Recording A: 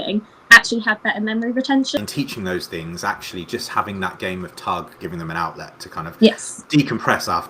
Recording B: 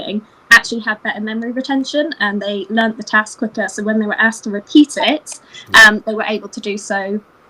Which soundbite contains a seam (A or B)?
A